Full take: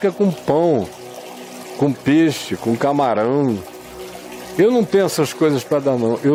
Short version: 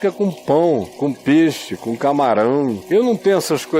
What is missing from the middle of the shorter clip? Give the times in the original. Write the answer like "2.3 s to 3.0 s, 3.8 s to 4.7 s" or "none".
0.9 s to 1.7 s, 3.6 s to 4.5 s